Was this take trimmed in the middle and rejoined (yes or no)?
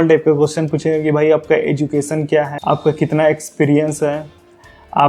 yes